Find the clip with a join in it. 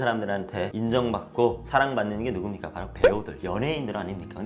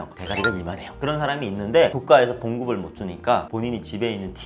second; 1 cut; at 2.0 s

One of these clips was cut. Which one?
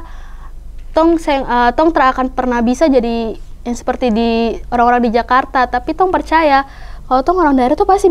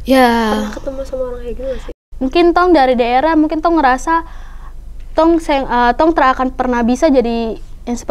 second; 1 cut; at 1.8 s

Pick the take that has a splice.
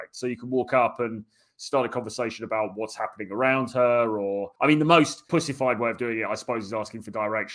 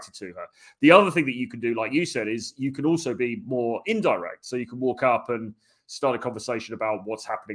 first; 2 cuts; at 4.5 s, 5.3 s

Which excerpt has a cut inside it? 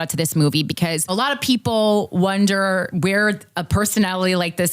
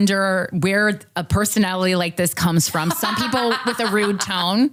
first; 1 cut; at 1.1 s

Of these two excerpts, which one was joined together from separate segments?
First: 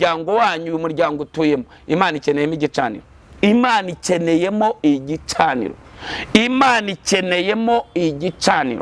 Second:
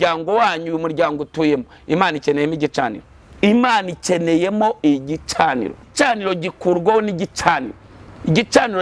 second; 1 cut; at 5.9 s

